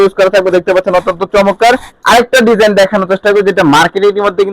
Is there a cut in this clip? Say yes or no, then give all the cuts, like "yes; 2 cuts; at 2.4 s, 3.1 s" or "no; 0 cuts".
yes; 1 cut; at 1.9 s